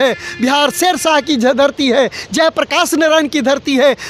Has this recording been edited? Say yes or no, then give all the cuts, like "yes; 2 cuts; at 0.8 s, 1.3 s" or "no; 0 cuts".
no; 0 cuts